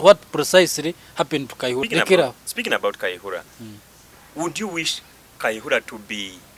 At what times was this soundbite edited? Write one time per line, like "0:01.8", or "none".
0:01.8